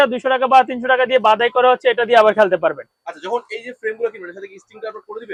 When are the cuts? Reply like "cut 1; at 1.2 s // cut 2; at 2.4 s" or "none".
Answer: none